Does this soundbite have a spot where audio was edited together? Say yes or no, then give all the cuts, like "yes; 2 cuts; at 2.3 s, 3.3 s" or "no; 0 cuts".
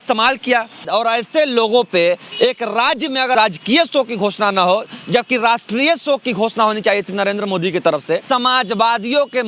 yes; 3 cuts; at 0.8 s, 3.4 s, 8.2 s